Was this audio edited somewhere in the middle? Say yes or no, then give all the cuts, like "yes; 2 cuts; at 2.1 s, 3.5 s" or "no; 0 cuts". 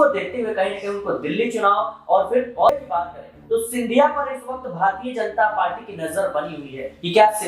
yes; 1 cut; at 2.7 s